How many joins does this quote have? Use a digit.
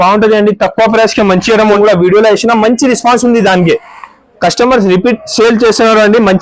1